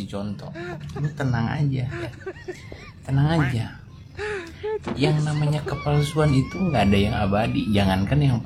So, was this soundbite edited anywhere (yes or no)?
no